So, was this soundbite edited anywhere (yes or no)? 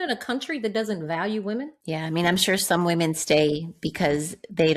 yes